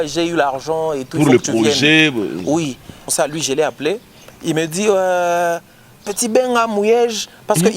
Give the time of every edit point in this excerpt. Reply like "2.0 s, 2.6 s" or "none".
3.1 s